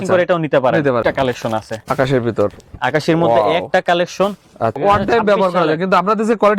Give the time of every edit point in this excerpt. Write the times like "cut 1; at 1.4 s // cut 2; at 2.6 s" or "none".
cut 1; at 1.0 s // cut 2; at 4.8 s